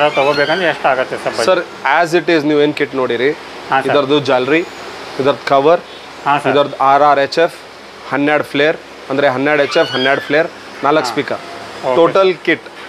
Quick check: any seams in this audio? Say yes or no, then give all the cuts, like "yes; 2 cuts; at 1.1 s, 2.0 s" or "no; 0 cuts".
no; 0 cuts